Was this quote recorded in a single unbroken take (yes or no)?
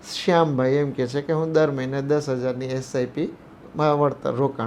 yes